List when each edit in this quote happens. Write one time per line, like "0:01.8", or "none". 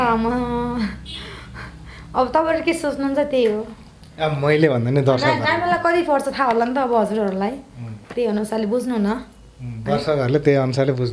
none